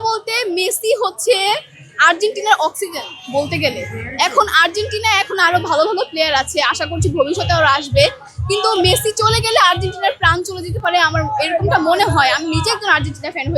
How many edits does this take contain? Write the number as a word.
zero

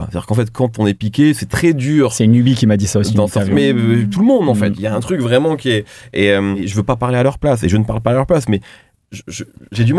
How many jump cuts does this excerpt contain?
one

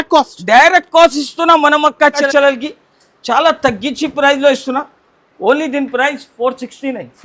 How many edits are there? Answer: one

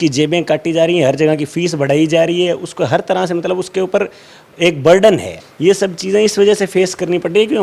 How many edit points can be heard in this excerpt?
one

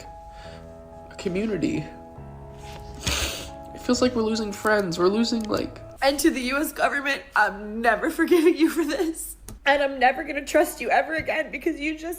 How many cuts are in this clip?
one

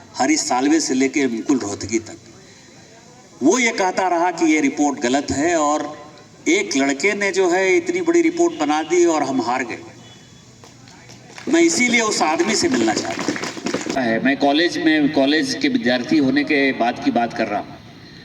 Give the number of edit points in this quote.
one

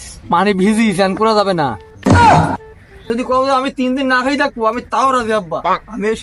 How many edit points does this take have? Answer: one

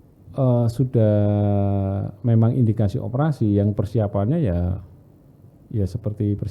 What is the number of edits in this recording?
zero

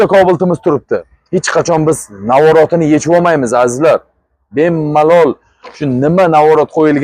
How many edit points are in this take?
one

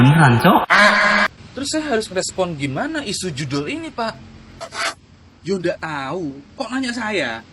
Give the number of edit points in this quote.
one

